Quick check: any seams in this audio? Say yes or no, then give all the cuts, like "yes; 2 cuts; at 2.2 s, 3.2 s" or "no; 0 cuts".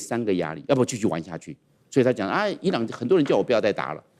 no; 0 cuts